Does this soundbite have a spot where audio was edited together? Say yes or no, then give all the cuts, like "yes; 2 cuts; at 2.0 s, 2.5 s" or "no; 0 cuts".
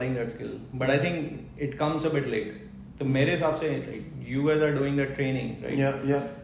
no; 0 cuts